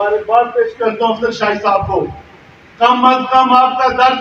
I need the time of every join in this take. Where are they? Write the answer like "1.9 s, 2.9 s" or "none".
none